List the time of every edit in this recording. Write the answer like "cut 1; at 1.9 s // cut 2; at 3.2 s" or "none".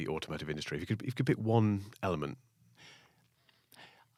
none